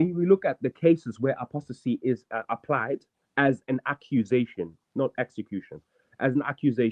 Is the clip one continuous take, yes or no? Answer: yes